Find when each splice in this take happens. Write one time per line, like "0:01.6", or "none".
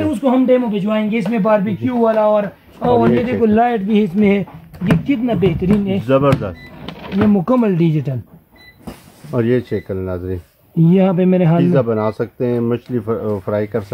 none